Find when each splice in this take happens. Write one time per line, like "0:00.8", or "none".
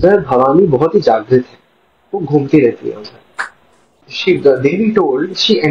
0:04.1